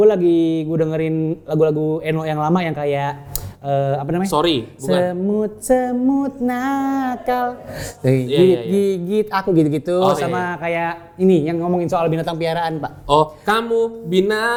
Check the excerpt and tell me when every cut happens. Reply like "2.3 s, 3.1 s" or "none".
none